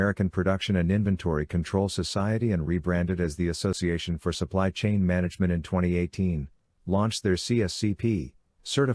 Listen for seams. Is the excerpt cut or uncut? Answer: cut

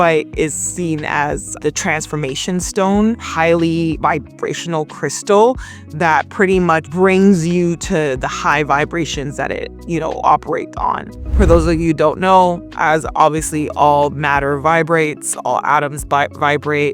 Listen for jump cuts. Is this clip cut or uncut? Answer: uncut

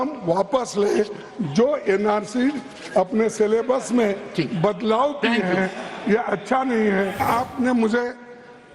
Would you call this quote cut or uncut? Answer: cut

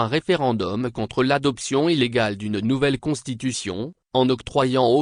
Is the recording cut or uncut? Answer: cut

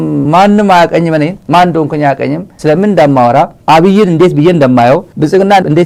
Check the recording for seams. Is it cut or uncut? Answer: uncut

